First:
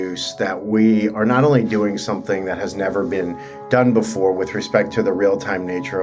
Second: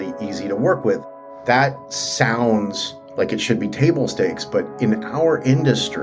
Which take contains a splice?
second; 1 cut; at 1.1 s

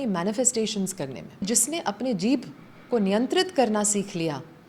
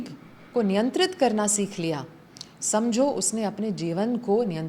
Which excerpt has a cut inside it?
first; 1 cut; at 1.4 s

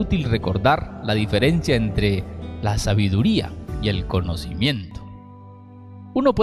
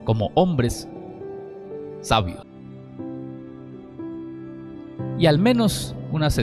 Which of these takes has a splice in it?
second; 1 cut; at 2.5 s

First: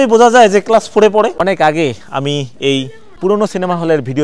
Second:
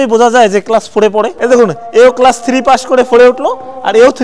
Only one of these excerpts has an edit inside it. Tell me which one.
first; 2 cuts; at 1.3 s, 3.0 s

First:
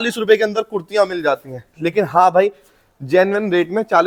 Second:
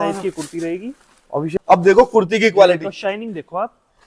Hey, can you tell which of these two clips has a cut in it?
second; 1 cut; at 1.5 s

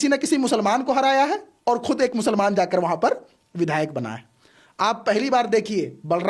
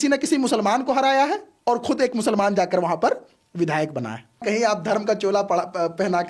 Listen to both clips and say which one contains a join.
second; 1 cut; at 4.4 s

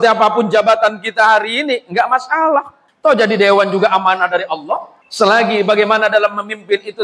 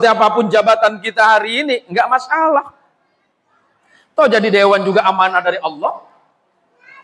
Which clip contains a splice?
first; 2 cuts; at 2.8 s, 5.0 s

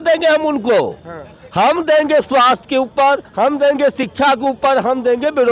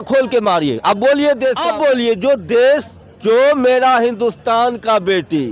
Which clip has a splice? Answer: second; 1 cut; at 1.6 s

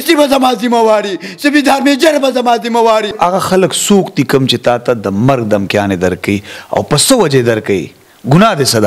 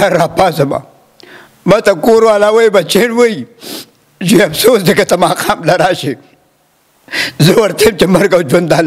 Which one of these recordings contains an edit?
first; 1 cut; at 3.1 s

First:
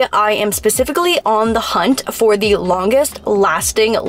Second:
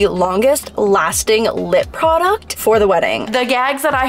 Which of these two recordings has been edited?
second; 2 cuts; at 2.5 s, 3.3 s

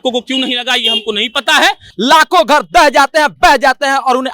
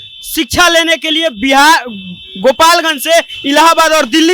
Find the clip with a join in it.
first; 1 cut; at 1.9 s

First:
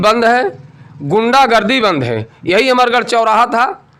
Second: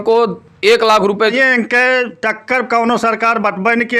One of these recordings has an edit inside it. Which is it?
second; 1 cut; at 1.3 s

